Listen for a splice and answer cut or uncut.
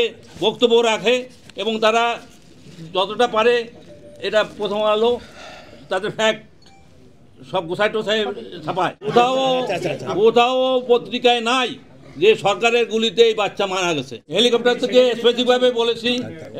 cut